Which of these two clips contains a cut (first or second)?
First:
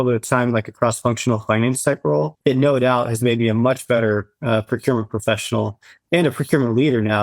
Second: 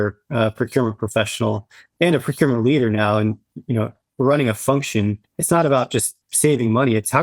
first